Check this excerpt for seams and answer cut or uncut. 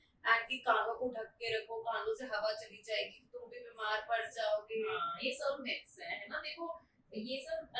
uncut